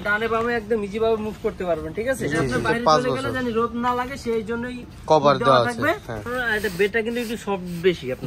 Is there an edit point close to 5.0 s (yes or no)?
no